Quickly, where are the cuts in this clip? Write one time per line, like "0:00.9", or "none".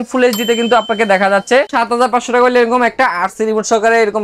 0:01.7